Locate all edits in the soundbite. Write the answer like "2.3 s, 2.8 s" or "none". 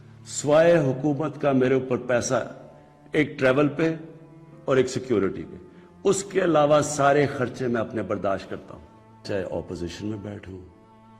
9.2 s